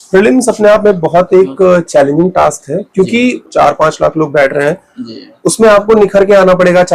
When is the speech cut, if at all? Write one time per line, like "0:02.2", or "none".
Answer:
0:03.5